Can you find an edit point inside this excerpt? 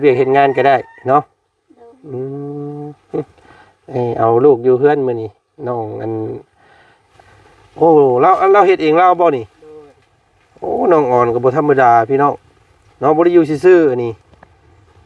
yes; 1 cut; at 7.0 s

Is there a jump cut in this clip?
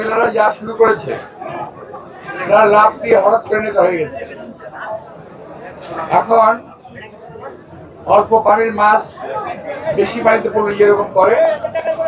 no; 0 cuts

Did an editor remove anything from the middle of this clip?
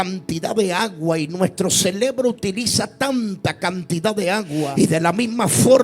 yes; 1 cut; at 4.7 s

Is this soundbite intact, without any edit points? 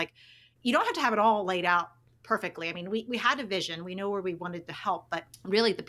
no; 1 cut; at 4.9 s

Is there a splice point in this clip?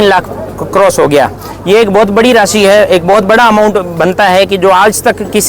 no; 0 cuts

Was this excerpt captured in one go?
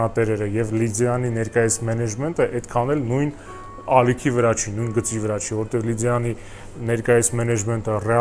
yes; 0 cuts

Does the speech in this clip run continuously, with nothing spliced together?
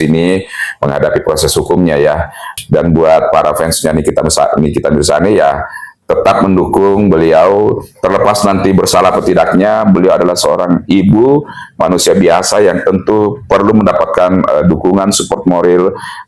no; 1 cut; at 2.4 s

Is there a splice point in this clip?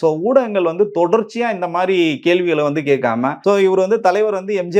yes; 1 cut; at 3.4 s

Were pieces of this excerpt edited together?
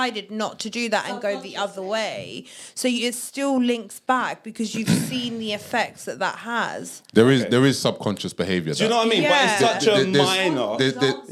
no; 0 cuts

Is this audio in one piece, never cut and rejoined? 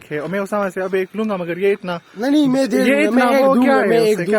yes; 0 cuts

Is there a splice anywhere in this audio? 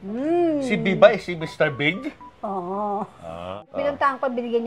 yes; 1 cut; at 3.6 s

